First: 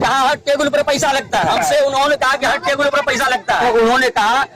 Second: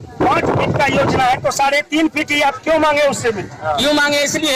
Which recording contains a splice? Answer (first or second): first